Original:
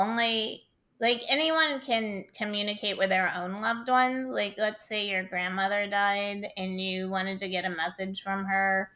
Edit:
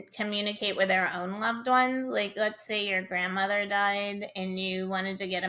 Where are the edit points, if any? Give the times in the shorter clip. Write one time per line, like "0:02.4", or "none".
none